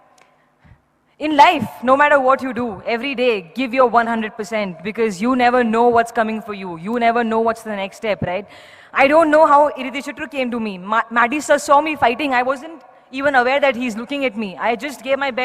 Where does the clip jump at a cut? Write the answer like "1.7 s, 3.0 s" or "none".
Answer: none